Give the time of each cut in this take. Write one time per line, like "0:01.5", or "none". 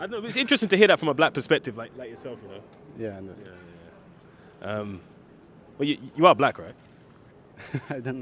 none